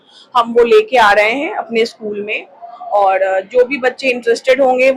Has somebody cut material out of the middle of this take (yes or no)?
no